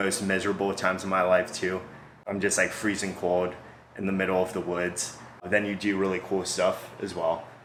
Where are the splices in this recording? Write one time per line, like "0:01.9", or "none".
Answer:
none